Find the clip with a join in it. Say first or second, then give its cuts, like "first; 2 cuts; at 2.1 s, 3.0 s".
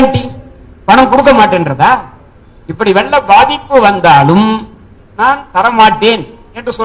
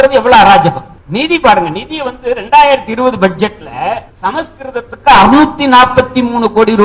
second; 2 cuts; at 0.9 s, 4.1 s